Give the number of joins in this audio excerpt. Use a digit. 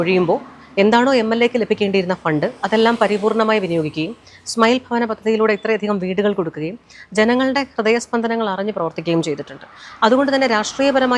0